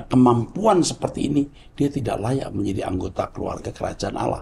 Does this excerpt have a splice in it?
no; 0 cuts

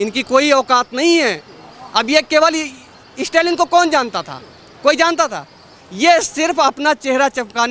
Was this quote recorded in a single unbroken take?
yes; 0 cuts

